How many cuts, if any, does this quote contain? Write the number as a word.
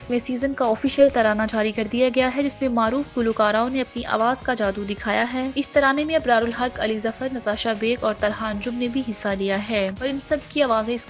zero